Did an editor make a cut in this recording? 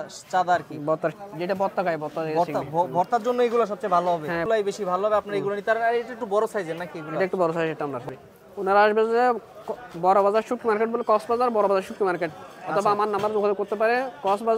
yes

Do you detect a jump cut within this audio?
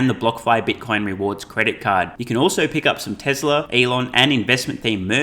yes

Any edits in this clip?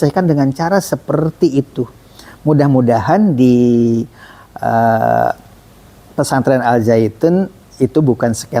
no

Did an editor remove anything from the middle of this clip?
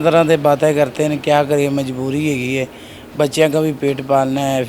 no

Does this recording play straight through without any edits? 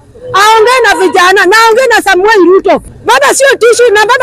no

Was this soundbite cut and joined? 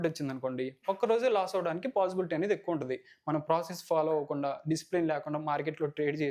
no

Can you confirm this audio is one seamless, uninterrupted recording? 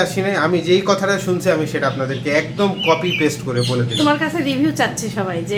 yes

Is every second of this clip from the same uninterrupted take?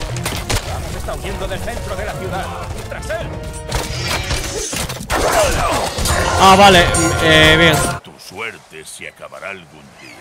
no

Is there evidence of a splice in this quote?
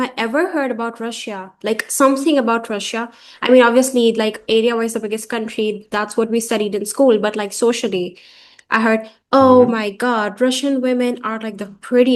no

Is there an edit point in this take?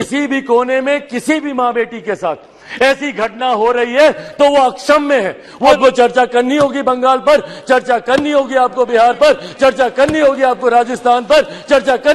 yes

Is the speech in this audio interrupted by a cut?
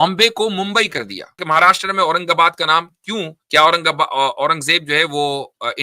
yes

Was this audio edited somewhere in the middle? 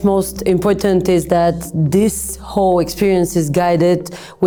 no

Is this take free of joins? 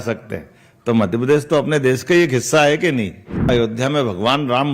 no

